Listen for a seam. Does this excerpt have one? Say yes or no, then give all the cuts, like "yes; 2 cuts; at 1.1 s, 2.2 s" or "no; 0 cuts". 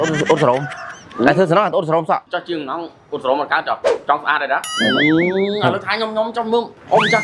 yes; 2 cuts; at 2.3 s, 4.7 s